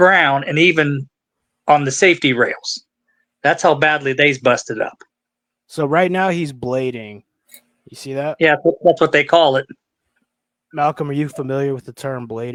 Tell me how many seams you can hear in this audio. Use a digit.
0